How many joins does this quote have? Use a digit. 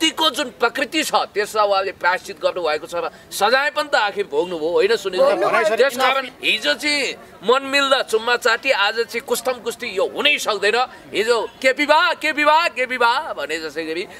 1